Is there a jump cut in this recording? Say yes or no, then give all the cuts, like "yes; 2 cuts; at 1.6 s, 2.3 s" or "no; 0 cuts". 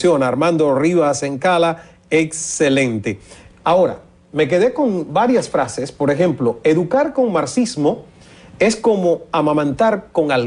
no; 0 cuts